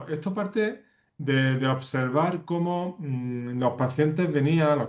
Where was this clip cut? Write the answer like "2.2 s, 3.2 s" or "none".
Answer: 1.1 s